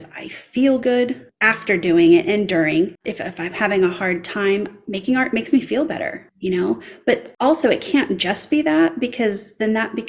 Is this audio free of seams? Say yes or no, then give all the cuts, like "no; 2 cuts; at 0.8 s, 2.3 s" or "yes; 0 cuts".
no; 3 cuts; at 3.1 s, 6.2 s, 7.3 s